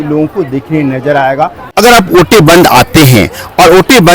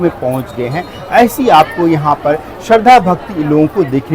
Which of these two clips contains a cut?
first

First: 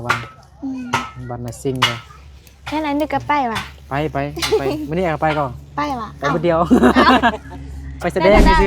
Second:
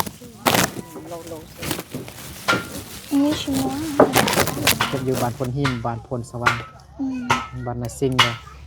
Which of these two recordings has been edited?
second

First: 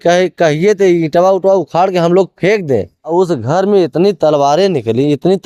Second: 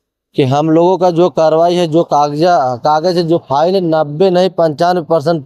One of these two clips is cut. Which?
first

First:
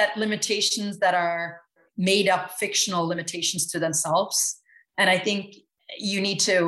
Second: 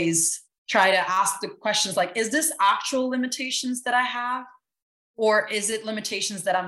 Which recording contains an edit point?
first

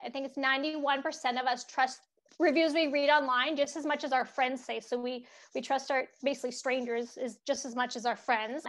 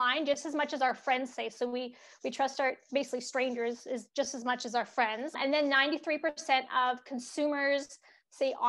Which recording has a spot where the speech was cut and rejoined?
first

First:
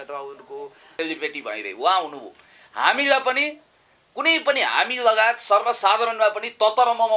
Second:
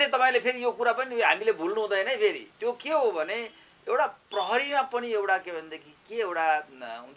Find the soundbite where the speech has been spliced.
first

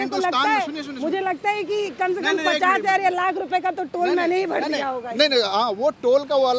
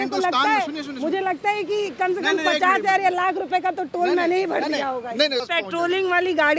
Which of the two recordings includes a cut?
second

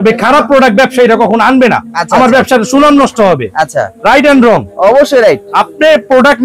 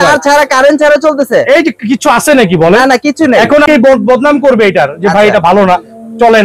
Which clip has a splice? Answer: second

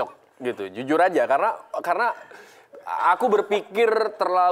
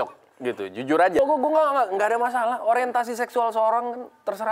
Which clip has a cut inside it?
second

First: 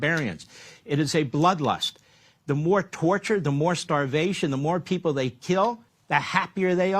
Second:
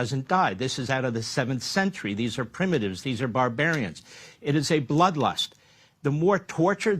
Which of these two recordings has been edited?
first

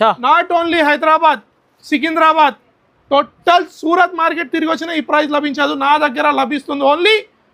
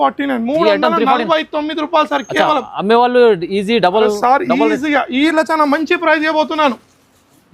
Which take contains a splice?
second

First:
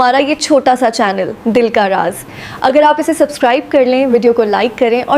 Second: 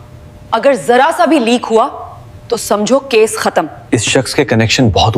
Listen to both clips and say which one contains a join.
second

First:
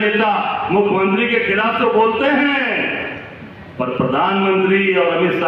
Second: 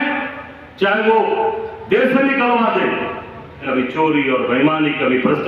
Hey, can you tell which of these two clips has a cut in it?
second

